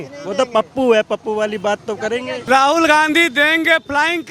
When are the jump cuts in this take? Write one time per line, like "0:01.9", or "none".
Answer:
0:02.4